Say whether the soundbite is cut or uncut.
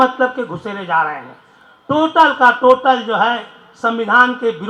uncut